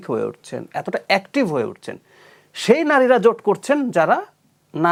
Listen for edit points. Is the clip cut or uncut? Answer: uncut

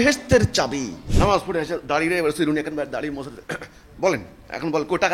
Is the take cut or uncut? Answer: cut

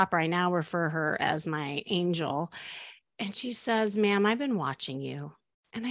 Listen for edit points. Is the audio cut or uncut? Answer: uncut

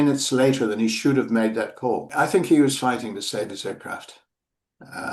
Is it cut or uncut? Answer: cut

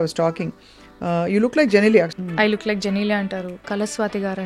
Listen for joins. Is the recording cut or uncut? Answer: cut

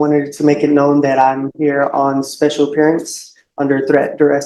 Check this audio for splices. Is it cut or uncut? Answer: uncut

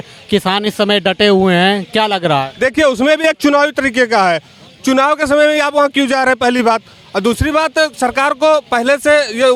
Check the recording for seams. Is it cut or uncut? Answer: uncut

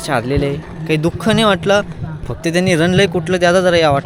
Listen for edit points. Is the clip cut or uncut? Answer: uncut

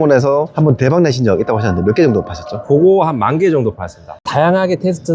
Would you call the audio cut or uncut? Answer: cut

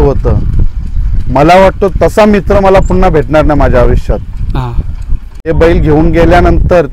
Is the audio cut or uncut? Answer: cut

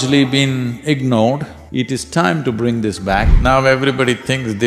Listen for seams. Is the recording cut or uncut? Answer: cut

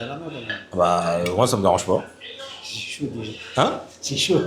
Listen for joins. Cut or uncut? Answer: uncut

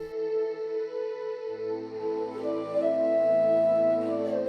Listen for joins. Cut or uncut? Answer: uncut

